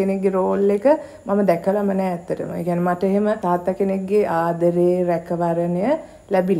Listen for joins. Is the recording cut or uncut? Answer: cut